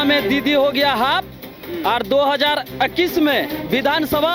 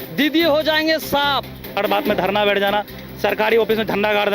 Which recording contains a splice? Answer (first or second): second